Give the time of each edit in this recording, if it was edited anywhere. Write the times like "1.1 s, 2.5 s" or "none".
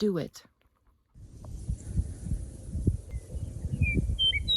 1.3 s